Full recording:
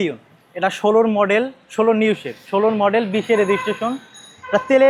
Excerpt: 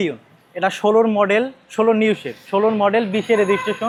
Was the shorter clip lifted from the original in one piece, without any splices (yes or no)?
yes